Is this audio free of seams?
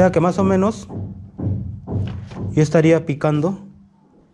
yes; 0 cuts

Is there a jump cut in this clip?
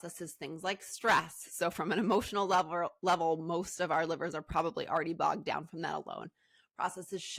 no; 0 cuts

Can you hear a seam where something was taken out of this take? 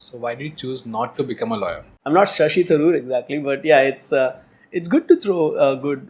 yes; 1 cut; at 1.9 s

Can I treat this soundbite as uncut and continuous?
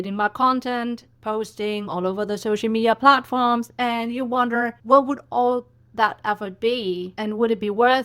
no; 2 cuts; at 4.8 s, 7.1 s

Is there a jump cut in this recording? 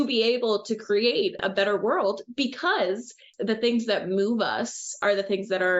yes; 2 cuts; at 3.3 s, 5.0 s

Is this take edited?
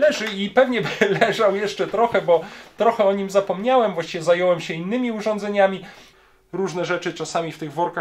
yes; 1 cut; at 6.0 s

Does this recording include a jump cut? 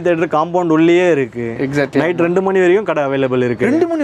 no; 0 cuts

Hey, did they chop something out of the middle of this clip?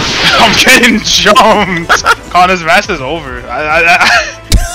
yes; 1 cut; at 2.2 s

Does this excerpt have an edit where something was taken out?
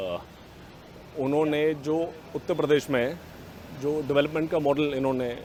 no; 0 cuts

